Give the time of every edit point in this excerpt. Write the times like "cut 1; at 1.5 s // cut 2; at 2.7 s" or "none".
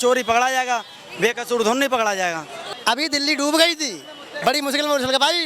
cut 1; at 2.5 s